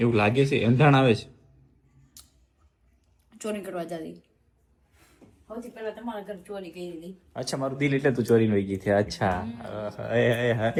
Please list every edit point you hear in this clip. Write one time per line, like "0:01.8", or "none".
none